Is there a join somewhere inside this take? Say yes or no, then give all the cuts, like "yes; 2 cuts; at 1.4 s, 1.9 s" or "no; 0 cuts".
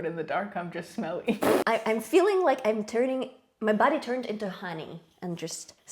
yes; 1 cut; at 1.6 s